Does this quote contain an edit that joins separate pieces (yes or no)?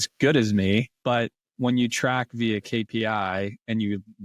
yes